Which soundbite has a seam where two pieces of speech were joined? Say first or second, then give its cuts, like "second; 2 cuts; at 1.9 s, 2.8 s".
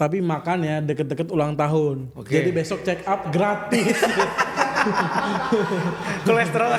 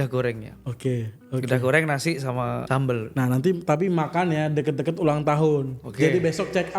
second; 1 cut; at 2.6 s